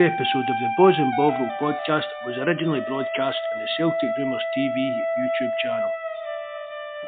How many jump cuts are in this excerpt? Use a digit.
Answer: 0